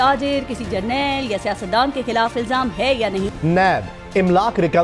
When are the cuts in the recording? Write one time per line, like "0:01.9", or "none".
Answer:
0:03.3

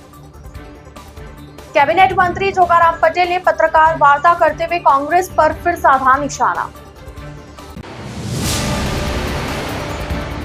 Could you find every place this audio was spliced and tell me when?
0:01.3

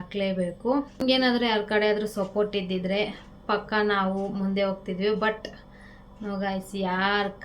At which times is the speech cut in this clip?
0:01.0

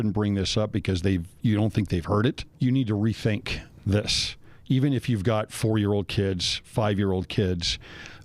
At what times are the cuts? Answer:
0:02.5

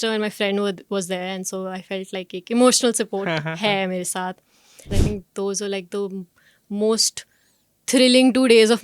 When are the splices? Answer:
0:04.9

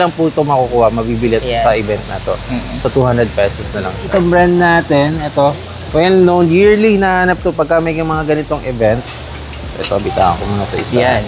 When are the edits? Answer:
0:04.1

